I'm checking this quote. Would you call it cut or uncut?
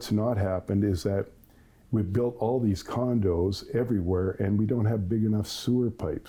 uncut